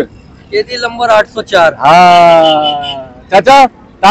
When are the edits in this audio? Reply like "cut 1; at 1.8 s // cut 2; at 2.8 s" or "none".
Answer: none